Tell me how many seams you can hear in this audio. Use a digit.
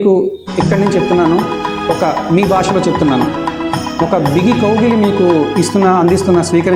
0